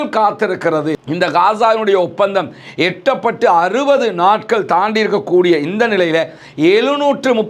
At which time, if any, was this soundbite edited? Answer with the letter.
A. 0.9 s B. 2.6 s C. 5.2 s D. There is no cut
A